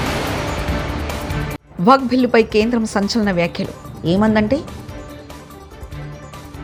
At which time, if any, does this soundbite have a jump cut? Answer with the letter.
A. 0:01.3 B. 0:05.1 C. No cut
C